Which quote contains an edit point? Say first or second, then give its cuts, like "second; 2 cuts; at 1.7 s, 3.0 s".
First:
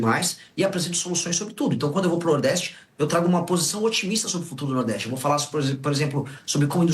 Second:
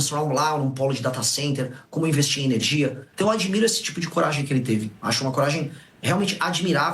second; 1 cut; at 3.0 s